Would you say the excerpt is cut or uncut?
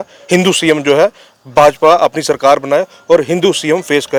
uncut